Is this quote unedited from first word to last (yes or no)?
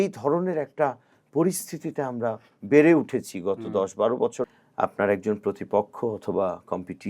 no